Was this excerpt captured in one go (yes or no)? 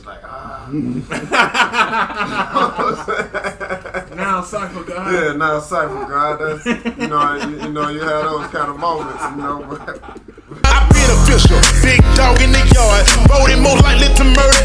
no